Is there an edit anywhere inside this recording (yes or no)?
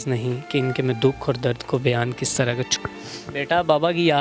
yes